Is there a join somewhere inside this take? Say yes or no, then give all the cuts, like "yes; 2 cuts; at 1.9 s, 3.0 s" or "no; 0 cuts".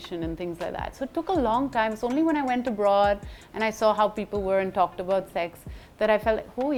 no; 0 cuts